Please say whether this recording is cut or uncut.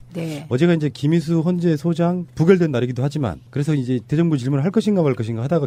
uncut